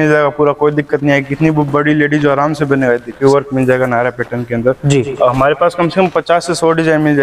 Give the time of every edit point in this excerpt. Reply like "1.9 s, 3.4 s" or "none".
3.2 s